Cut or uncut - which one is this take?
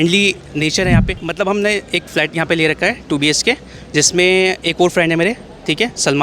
cut